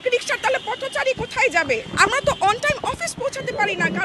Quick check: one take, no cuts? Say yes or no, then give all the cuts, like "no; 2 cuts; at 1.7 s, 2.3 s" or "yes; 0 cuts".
yes; 0 cuts